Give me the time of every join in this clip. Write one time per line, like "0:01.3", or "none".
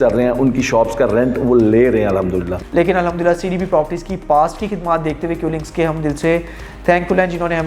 0:02.5